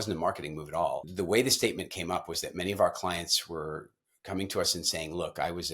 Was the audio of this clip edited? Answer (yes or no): yes